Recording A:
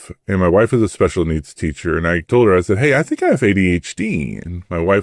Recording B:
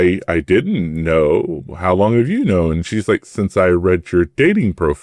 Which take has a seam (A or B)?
A